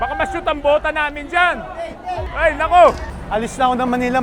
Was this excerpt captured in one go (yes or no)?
no